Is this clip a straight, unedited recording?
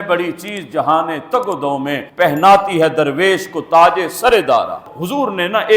no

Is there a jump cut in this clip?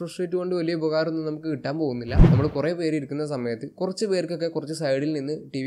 yes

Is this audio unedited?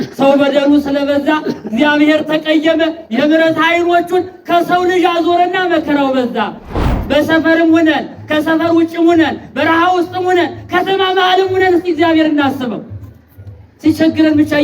no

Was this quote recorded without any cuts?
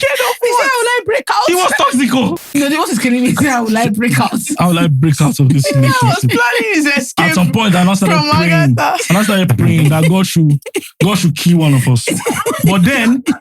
no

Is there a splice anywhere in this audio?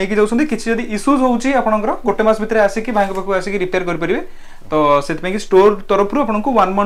no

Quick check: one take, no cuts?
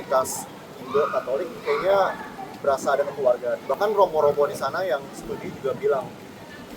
yes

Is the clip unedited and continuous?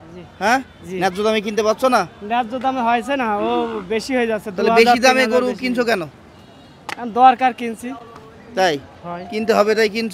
yes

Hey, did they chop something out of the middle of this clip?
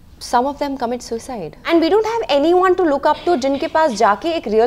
yes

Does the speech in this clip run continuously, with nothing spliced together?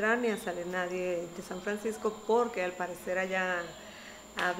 yes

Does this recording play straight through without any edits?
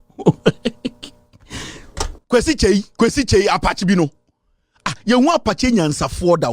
no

